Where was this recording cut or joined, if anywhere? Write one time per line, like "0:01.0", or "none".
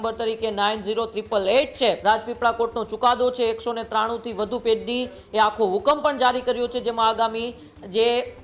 0:02.0